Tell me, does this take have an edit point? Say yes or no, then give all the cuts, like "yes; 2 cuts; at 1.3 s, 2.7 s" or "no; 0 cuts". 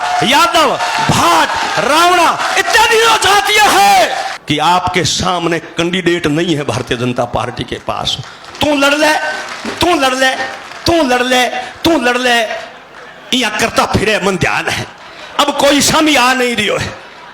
yes; 1 cut; at 4.3 s